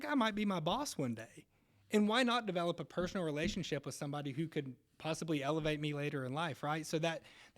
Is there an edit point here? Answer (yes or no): no